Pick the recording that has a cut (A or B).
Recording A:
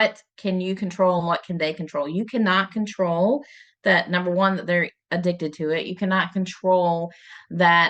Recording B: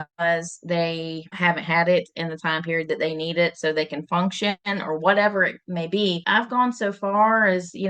B